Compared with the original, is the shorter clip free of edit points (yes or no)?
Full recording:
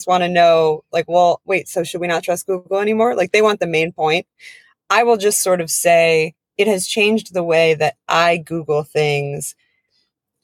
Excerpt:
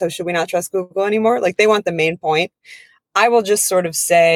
yes